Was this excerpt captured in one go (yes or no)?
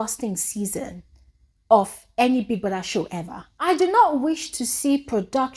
no